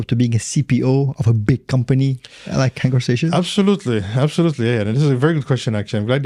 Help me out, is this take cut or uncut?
uncut